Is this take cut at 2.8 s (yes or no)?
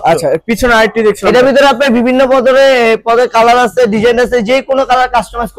no